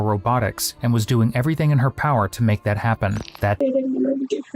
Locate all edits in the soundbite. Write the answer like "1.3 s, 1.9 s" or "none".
3.6 s